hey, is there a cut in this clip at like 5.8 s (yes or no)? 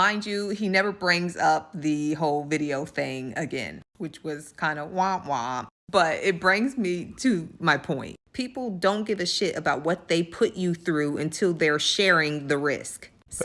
no